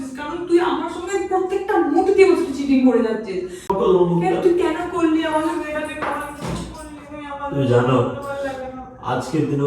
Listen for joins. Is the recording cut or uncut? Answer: cut